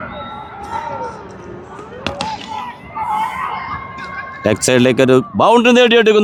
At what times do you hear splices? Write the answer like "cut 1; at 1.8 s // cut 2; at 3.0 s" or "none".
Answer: none